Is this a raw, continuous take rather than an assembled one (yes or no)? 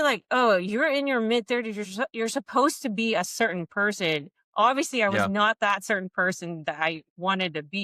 yes